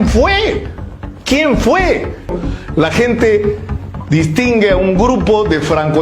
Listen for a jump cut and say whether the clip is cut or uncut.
cut